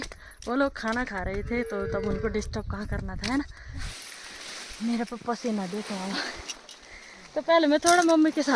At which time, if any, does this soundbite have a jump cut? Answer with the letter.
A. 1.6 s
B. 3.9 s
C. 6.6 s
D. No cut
B